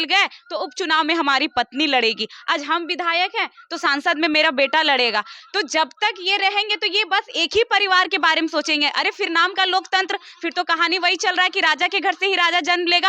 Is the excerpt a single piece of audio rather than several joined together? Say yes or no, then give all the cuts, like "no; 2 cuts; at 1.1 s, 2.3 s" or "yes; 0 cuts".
yes; 0 cuts